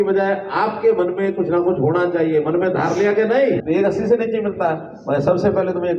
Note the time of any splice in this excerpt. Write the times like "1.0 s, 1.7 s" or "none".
3.6 s